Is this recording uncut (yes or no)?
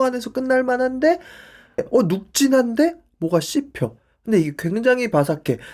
no